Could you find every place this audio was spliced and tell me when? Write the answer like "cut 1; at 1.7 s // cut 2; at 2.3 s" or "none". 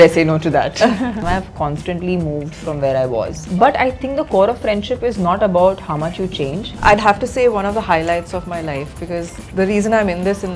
cut 1; at 1.2 s // cut 2; at 3.5 s // cut 3; at 6.7 s